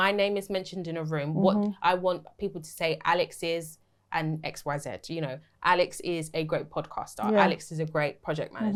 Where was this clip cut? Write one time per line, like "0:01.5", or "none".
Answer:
none